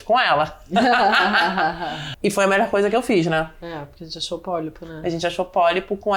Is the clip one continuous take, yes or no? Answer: no